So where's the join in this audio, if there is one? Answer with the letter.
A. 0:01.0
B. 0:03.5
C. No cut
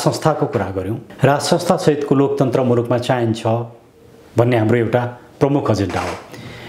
A